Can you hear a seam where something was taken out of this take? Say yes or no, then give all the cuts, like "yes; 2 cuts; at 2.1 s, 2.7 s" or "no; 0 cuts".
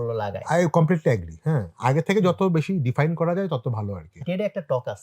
yes; 1 cut; at 4.1 s